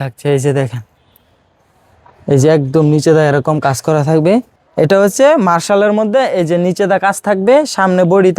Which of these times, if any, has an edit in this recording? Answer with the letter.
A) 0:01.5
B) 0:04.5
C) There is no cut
B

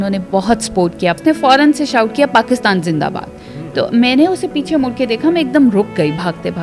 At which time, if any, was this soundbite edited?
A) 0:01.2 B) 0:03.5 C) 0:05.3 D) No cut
A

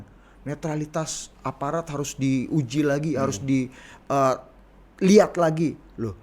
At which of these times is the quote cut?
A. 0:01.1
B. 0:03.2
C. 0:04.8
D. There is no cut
D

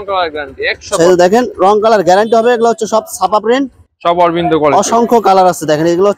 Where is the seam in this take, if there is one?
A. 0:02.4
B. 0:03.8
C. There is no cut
B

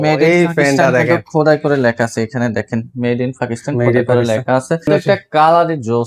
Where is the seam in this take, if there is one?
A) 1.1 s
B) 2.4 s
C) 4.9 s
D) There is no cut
C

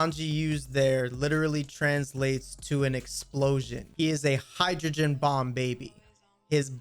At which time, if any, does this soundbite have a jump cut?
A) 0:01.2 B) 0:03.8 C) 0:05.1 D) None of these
B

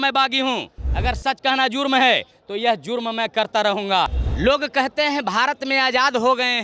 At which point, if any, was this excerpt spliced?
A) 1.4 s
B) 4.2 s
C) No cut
B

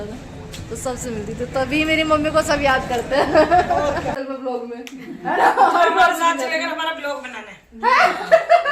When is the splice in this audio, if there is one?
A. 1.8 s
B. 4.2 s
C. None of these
B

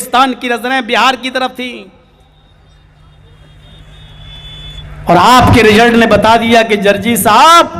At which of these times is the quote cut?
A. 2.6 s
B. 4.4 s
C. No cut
C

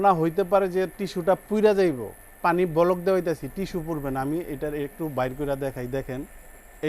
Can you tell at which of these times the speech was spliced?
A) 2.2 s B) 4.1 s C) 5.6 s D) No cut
A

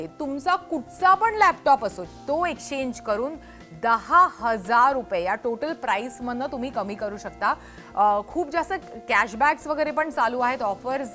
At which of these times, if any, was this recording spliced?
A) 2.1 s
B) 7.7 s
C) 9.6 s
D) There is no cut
A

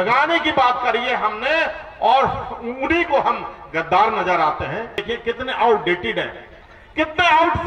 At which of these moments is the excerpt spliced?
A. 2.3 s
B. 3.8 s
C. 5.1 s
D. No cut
C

